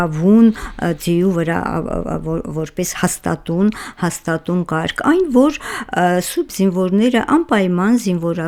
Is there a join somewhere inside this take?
no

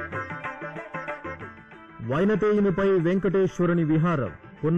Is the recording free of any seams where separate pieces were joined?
no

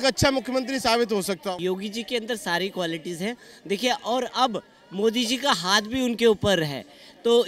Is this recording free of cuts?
no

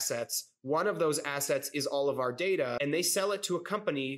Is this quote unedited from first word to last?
no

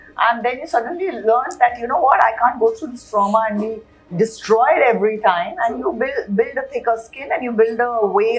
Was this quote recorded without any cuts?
yes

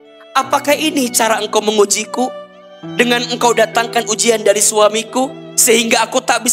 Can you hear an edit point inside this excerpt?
no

